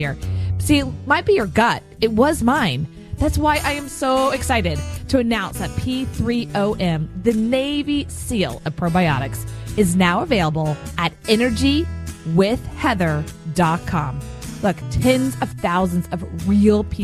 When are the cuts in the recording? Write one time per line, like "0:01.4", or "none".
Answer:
0:14.9